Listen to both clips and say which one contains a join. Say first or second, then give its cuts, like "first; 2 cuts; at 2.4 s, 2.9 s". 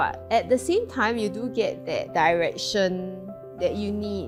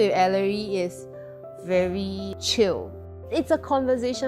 second; 1 cut; at 3.2 s